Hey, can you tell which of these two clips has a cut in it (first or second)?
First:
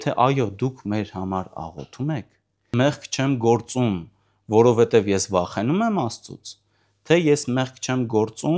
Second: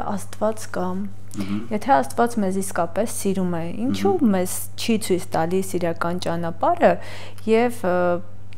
first